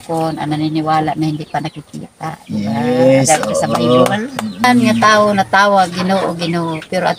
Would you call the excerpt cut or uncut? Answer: cut